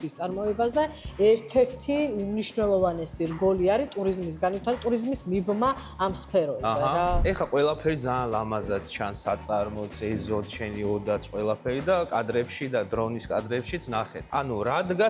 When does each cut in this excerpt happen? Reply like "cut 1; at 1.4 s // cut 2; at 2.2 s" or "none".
none

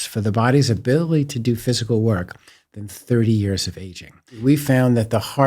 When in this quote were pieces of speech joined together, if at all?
cut 1; at 4.4 s

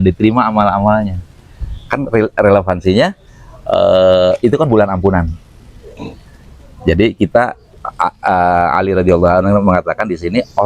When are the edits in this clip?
none

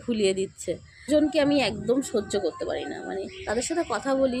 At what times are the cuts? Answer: cut 1; at 1.1 s

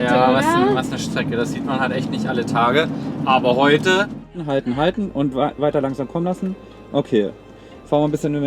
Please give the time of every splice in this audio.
cut 1; at 4.4 s

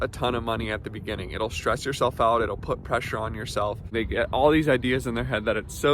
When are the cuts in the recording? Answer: cut 1; at 3.9 s

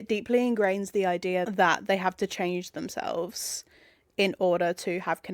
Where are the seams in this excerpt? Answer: cut 1; at 1.5 s

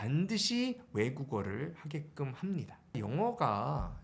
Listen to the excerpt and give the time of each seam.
cut 1; at 2.9 s

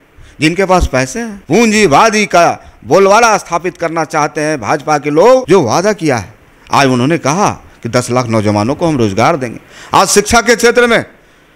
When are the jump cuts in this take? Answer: cut 1; at 1.3 s // cut 2; at 5.4 s

